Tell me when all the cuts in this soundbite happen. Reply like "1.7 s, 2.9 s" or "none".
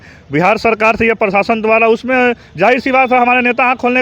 none